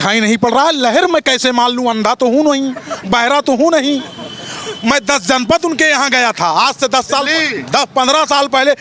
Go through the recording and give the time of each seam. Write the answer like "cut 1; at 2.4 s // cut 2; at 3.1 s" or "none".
none

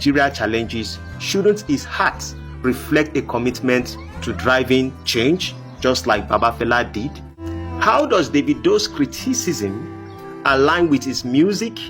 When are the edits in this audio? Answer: cut 1; at 7.4 s

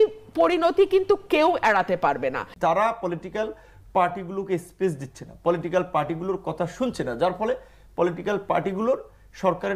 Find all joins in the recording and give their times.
cut 1; at 2.5 s

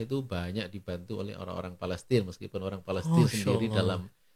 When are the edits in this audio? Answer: none

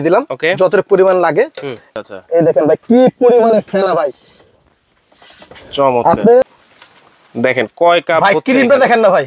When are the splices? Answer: cut 1; at 1.8 s // cut 2; at 6.4 s

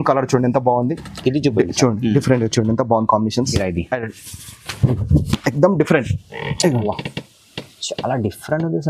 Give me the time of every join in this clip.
cut 1; at 3.5 s

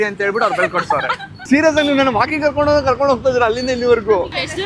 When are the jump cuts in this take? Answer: cut 1; at 1.1 s

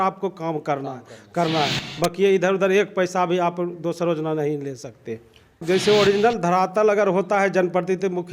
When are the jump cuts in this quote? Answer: cut 1; at 5.6 s

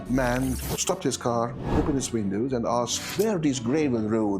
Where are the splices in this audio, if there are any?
cut 1; at 1.6 s // cut 2; at 3.0 s

